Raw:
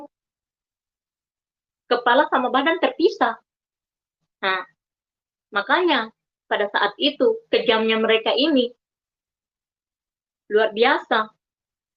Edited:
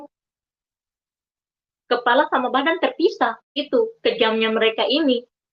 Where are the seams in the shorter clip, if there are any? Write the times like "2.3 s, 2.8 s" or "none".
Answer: 3.6 s